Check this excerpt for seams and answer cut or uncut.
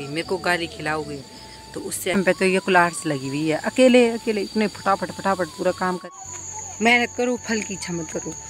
cut